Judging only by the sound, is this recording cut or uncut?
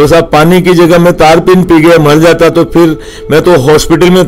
uncut